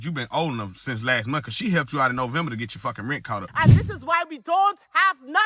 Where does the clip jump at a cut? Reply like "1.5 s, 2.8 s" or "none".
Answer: 3.5 s

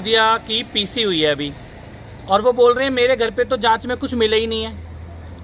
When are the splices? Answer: none

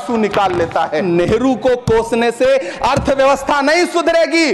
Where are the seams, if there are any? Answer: none

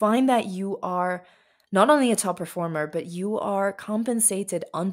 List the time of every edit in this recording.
none

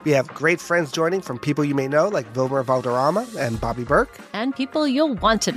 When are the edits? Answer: none

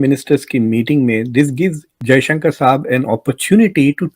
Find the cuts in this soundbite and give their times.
1.9 s

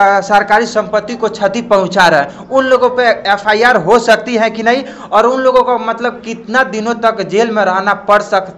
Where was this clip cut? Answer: none

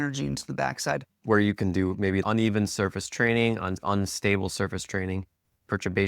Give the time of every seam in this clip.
1.2 s

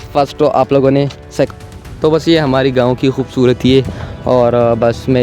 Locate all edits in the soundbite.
1.5 s

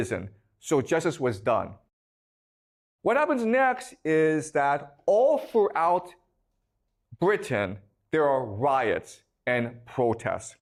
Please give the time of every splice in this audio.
none

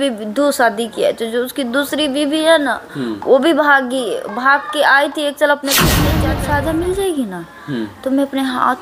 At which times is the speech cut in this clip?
6.2 s

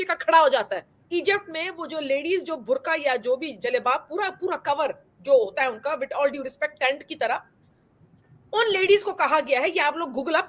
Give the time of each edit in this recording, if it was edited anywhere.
0.9 s

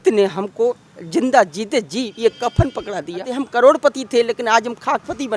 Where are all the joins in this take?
2.1 s, 3.3 s

